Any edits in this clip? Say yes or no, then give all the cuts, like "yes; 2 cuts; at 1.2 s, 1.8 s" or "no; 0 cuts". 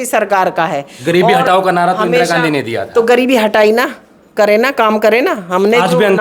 no; 0 cuts